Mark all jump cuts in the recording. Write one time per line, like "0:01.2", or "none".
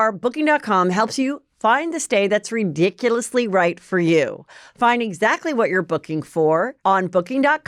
0:06.7